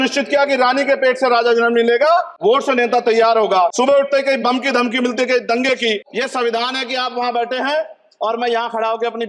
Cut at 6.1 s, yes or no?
yes